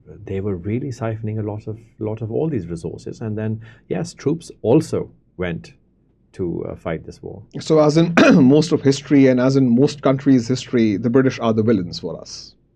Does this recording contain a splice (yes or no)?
no